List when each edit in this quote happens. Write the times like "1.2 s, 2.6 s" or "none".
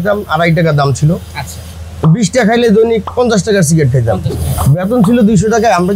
3.1 s, 4.4 s